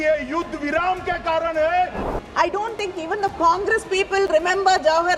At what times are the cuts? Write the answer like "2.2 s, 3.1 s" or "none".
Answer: 2.1 s